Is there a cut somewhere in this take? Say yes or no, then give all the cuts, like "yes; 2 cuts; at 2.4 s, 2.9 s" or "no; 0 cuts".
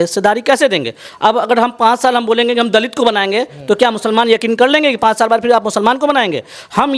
no; 0 cuts